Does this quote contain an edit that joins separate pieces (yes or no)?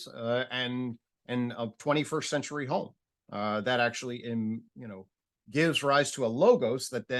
no